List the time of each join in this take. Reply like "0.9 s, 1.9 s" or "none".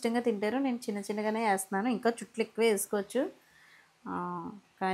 none